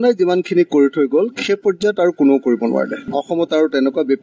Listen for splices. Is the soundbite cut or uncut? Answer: cut